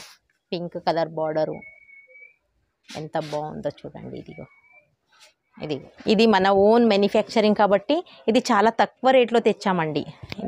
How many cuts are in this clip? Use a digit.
1